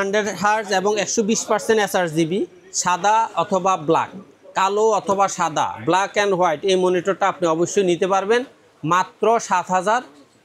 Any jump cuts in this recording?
no; 0 cuts

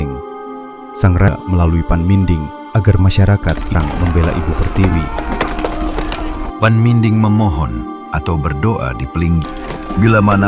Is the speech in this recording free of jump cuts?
no; 3 cuts; at 1.3 s, 3.8 s, 9.5 s

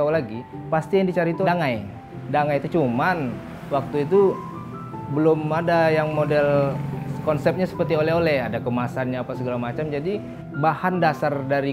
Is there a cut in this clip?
no; 0 cuts

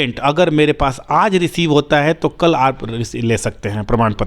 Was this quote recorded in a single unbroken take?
yes; 0 cuts

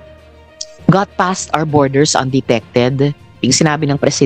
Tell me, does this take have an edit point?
no; 0 cuts

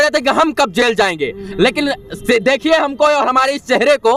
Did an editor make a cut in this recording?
no; 0 cuts

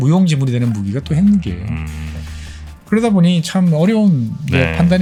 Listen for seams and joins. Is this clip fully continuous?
yes; 0 cuts

